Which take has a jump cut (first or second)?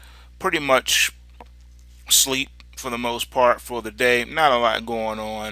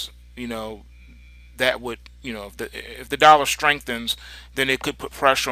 first